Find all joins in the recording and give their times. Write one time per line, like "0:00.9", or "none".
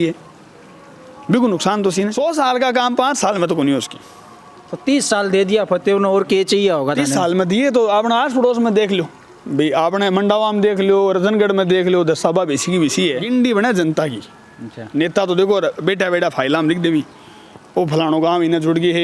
0:02.1
0:13.2